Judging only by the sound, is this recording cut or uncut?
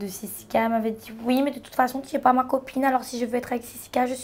uncut